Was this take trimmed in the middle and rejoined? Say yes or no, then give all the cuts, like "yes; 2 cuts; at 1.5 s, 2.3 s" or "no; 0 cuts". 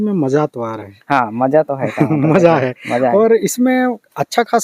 no; 0 cuts